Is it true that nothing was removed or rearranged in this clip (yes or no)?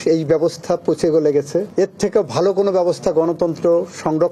yes